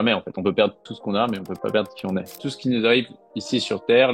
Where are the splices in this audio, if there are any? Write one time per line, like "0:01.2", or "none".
0:00.8
0:02.3